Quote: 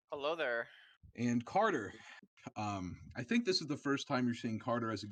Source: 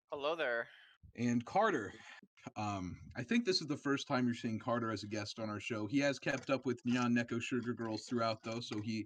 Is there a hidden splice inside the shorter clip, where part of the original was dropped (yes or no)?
no